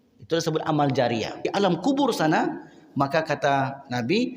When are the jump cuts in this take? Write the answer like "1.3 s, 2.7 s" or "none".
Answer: 1.5 s